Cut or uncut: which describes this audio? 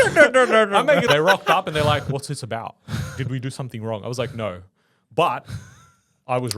cut